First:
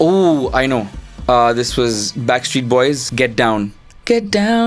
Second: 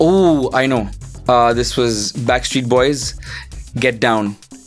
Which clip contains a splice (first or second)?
first